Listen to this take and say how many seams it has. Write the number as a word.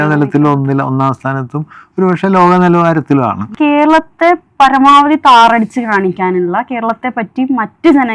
one